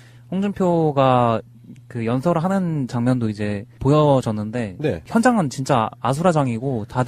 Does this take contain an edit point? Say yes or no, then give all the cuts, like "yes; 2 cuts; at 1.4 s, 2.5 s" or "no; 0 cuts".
no; 0 cuts